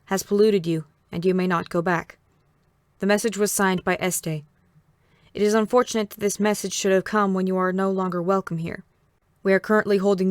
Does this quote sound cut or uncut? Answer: uncut